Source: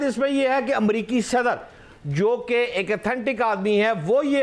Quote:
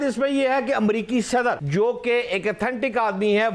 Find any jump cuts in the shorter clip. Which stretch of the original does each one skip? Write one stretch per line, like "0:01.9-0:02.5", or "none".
0:01.6-0:02.1